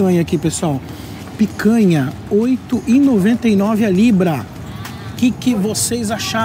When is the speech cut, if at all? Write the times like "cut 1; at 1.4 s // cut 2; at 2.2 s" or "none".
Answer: none